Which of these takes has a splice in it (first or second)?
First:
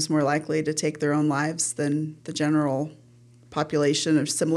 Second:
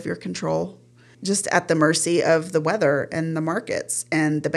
second